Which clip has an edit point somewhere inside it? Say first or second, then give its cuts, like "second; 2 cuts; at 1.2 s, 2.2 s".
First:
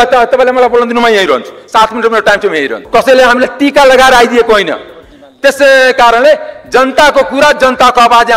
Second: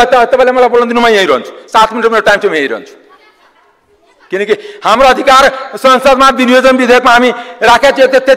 first; 1 cut; at 2.8 s